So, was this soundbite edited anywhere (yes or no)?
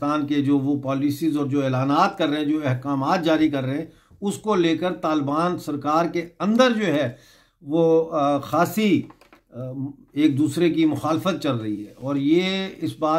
no